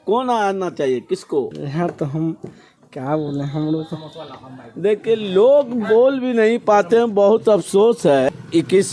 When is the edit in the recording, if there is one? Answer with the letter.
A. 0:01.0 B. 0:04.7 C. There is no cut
C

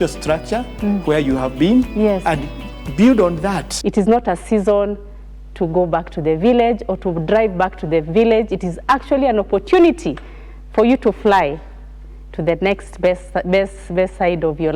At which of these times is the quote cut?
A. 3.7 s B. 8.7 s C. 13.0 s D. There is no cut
A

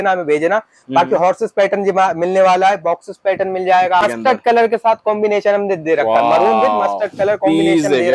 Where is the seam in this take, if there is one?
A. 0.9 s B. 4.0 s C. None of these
B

